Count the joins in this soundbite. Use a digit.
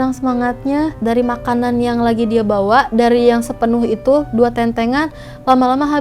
1